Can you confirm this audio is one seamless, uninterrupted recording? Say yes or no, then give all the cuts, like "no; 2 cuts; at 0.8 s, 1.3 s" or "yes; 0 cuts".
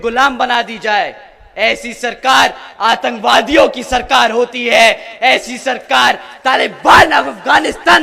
yes; 0 cuts